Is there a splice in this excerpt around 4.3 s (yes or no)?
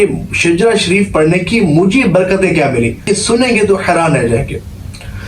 no